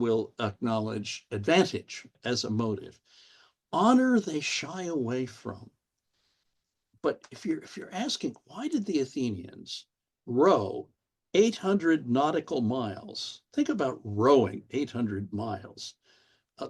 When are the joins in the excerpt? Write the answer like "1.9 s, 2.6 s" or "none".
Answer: 2.1 s